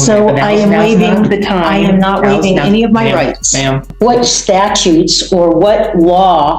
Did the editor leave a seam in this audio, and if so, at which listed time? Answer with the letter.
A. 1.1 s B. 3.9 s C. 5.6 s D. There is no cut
B